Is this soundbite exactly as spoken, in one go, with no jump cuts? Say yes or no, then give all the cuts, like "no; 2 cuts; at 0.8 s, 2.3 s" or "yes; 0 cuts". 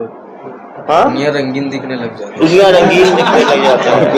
yes; 0 cuts